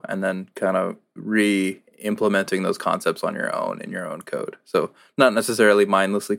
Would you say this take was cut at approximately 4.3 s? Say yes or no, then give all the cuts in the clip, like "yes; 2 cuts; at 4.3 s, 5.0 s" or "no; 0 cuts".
no; 1 cut; at 1.1 s